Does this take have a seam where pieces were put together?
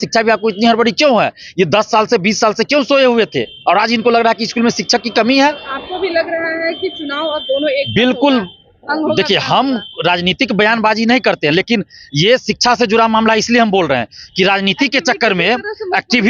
no; 0 cuts

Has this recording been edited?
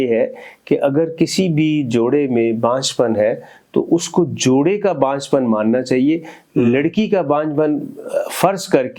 no; 0 cuts

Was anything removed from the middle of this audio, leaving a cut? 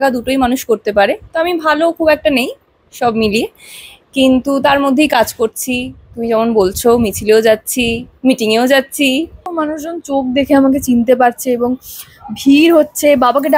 yes; 1 cut; at 9.4 s

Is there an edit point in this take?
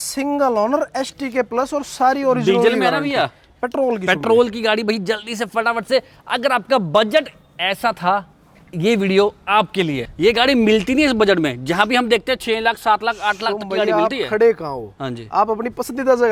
no; 0 cuts

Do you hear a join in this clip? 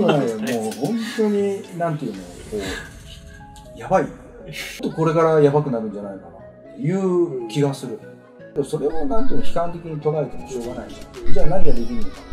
yes; 2 cuts; at 4.8 s, 8.5 s

